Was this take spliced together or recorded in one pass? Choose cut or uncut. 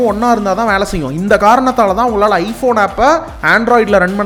uncut